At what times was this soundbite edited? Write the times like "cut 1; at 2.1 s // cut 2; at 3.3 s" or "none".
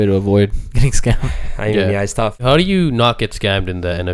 cut 1; at 2.4 s